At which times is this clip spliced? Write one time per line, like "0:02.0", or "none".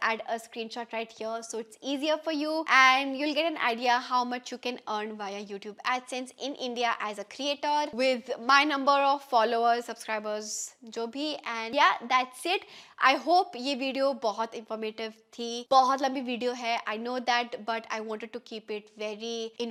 none